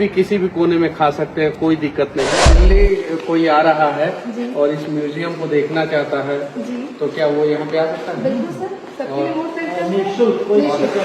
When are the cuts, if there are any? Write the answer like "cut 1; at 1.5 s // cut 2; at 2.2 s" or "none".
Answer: cut 1; at 2.5 s